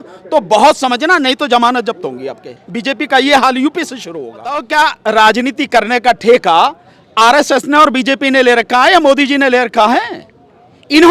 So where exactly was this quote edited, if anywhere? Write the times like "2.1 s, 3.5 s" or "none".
4.6 s